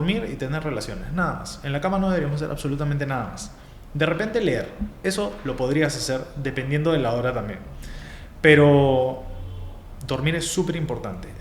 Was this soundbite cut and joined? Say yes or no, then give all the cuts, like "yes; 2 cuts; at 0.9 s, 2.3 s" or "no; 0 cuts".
no; 0 cuts